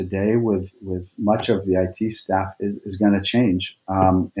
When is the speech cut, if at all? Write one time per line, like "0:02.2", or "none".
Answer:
none